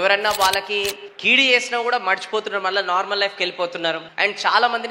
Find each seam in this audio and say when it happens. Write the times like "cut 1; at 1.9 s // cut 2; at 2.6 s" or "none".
cut 1; at 1.1 s // cut 2; at 4.1 s

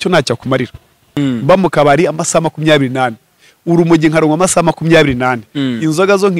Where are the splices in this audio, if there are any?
cut 1; at 1.1 s

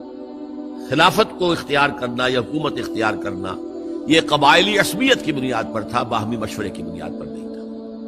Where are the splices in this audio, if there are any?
cut 1; at 6.8 s

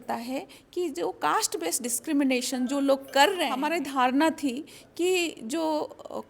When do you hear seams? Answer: cut 1; at 3.6 s

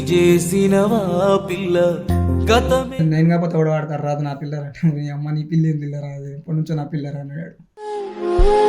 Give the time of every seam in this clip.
cut 1; at 2.9 s

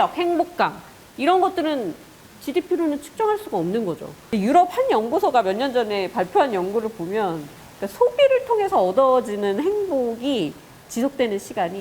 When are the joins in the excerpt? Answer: cut 1; at 4.1 s

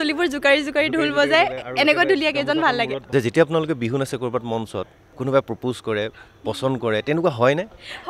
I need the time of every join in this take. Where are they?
cut 1; at 3.0 s // cut 2; at 5.1 s

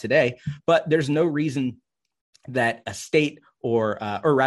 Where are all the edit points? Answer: none

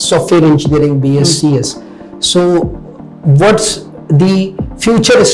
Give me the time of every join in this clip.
none

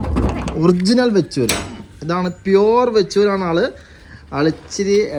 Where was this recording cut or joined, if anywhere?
none

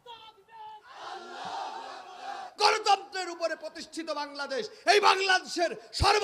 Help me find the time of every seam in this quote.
cut 1; at 2.4 s

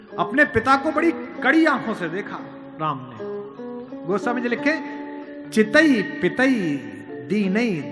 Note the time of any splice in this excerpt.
none

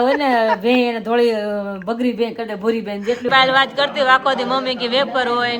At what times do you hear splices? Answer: cut 1; at 3.3 s

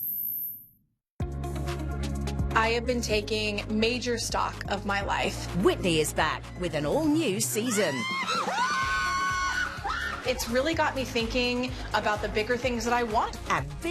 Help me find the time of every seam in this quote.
cut 1; at 1.0 s

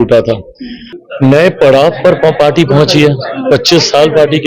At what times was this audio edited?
cut 1; at 1.0 s

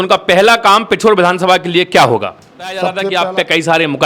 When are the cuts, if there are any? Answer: cut 1; at 3.0 s

